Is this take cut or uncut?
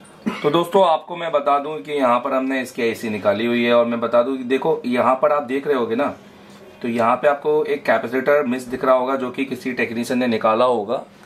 uncut